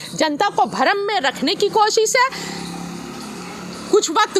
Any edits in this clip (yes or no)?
no